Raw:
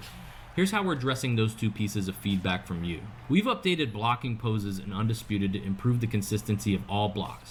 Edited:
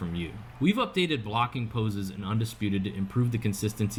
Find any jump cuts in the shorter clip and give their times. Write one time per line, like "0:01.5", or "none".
none